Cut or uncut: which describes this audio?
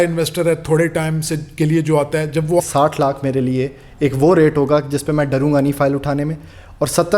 cut